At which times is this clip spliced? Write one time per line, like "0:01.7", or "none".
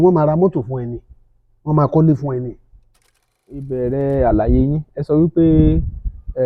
0:03.7